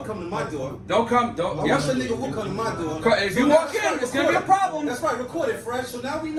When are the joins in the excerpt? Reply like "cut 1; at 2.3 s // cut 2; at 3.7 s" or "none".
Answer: none